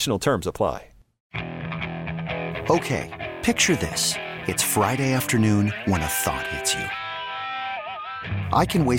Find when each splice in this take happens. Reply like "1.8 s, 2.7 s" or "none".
1.2 s